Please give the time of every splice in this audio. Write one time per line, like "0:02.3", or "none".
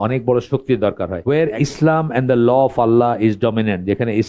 0:01.1